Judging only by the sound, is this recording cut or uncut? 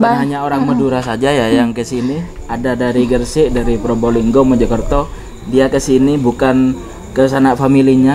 uncut